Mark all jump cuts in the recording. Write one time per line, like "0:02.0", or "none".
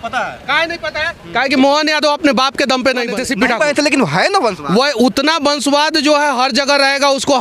0:03.1